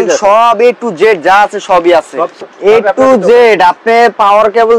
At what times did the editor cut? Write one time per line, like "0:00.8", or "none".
0:02.4